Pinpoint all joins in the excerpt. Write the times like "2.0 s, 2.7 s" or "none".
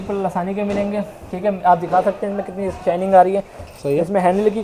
none